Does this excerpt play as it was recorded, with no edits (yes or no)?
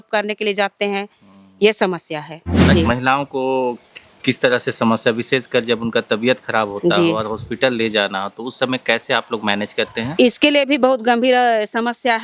no